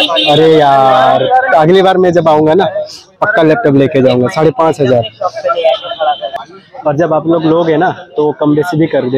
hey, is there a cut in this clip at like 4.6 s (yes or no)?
no